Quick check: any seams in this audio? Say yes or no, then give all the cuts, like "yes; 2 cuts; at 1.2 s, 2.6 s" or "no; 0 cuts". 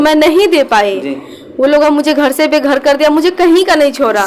no; 0 cuts